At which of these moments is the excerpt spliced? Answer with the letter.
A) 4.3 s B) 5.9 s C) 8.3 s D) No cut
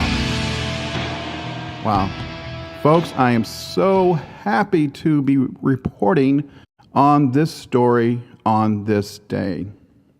C